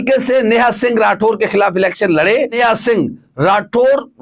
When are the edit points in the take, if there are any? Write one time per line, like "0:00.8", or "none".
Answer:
0:02.6

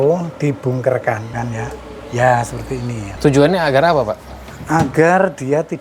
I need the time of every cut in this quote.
0:01.4
0:03.0

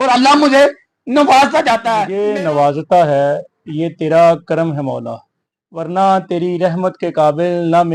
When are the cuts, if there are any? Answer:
0:02.0

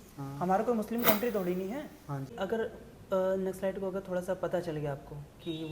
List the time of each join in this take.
0:02.3

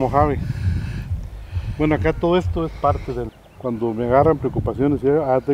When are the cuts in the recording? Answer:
0:03.3

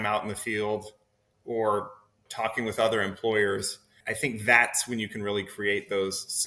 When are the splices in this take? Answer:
0:02.2

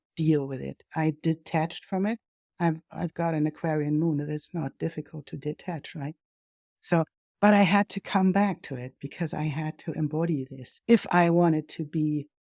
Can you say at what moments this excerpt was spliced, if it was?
0:10.6

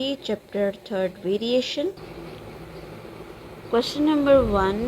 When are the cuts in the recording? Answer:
0:02.1

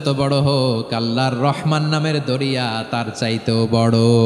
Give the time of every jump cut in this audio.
none

